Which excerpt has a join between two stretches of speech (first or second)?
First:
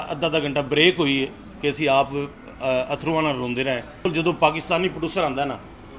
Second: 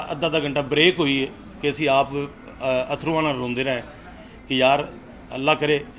first